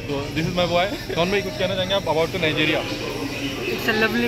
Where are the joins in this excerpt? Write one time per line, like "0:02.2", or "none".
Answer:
0:01.1